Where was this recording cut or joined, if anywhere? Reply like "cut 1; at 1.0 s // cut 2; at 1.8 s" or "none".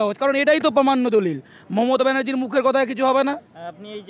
none